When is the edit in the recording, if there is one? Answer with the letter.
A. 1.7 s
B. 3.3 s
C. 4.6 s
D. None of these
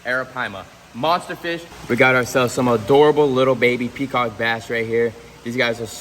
A